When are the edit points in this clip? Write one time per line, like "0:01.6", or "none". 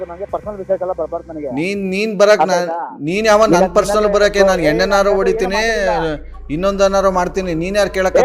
none

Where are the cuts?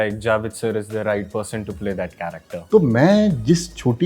0:02.5

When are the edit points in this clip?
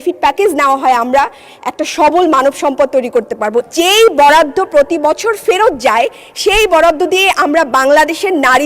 0:03.7

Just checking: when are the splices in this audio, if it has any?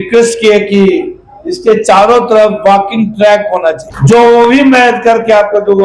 0:03.9

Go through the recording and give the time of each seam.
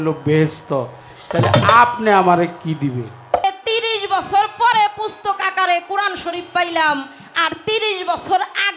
0:03.4

